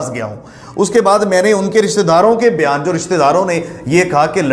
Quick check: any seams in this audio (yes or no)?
no